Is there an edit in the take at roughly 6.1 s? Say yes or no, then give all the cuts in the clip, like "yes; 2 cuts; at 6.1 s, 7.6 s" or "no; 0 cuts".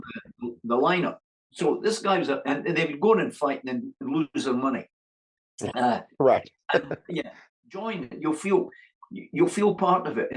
no; 1 cut; at 7.5 s